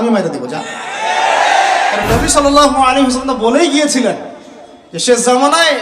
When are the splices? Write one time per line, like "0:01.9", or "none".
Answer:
0:02.0